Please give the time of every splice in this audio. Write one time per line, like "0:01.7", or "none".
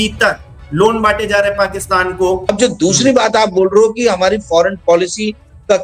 0:02.5

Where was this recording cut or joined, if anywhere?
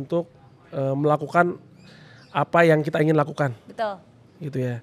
none

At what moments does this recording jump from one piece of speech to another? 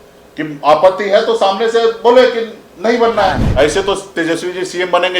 0:03.4

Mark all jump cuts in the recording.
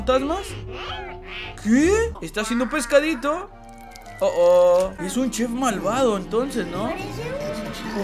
0:02.3
0:05.0

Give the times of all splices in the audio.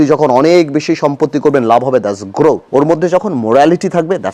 0:02.9

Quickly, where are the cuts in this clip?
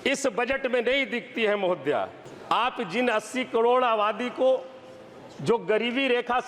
0:02.3

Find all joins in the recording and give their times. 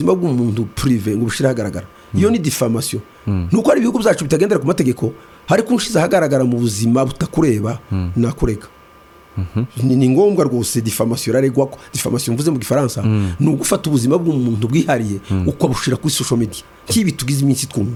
none

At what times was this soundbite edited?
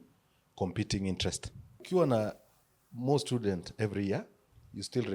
0:01.8

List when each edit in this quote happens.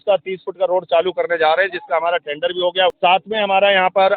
0:02.9

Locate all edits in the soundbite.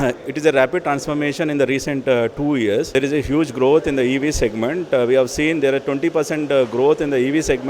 0:02.9

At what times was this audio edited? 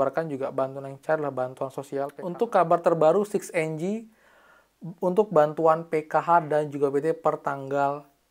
0:02.1

